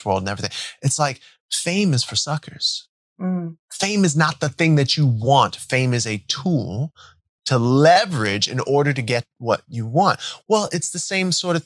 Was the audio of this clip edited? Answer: no; 0 cuts

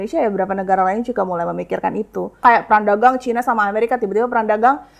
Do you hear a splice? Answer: yes; 1 cut; at 2.4 s

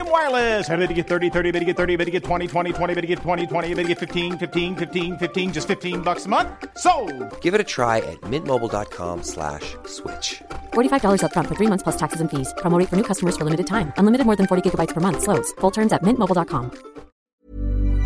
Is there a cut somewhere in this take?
yes; 1 cut; at 17.2 s

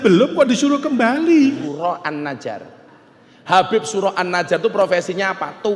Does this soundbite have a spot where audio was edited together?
yes; 1 cut; at 1.6 s

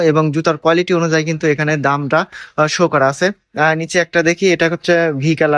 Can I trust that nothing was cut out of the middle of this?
yes; 0 cuts

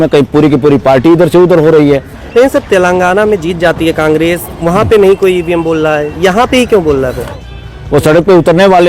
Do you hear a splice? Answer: yes; 2 cuts; at 2.1 s, 7.2 s

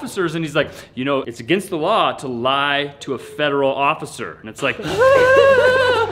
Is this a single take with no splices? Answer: no; 1 cut; at 4.8 s

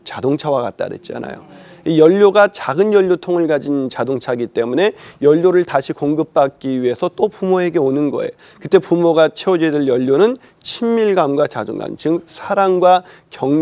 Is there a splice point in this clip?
no; 0 cuts

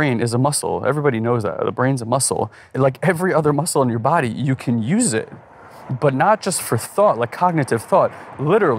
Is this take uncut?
no; 1 cut; at 2.6 s

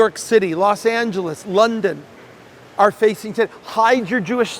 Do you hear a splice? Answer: no; 0 cuts

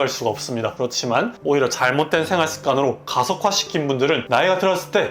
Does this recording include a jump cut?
yes; 2 cuts; at 1.3 s, 4.2 s

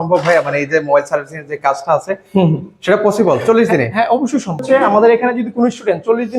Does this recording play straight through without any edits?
no; 1 cut; at 4.8 s

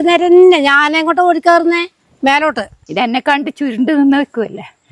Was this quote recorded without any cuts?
no; 1 cut; at 2.7 s

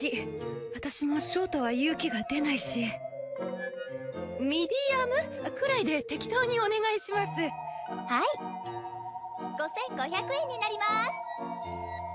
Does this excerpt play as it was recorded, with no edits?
yes; 0 cuts

